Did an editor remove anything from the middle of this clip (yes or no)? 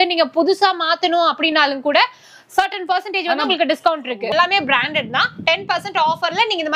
yes